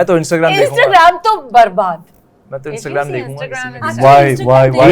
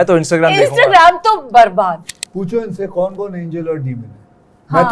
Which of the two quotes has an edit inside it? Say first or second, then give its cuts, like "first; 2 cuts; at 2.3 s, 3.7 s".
second; 1 cut; at 2.2 s